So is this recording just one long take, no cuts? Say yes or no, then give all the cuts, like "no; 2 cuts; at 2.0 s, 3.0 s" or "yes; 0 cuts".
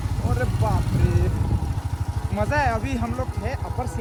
yes; 0 cuts